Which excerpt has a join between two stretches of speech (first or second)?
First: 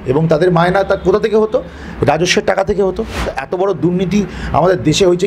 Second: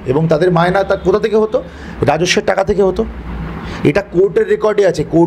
first